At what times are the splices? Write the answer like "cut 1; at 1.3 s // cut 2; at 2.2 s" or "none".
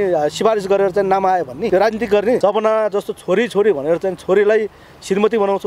cut 1; at 1.7 s // cut 2; at 2.4 s